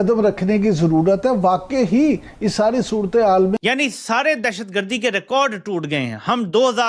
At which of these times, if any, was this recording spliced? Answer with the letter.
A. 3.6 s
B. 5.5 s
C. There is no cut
A